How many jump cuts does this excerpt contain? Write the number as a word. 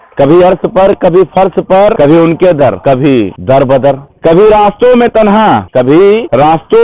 three